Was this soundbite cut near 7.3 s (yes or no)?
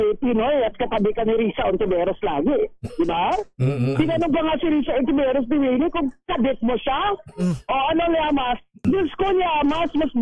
no